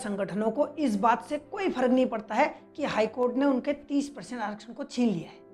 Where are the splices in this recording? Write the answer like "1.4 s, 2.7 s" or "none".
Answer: none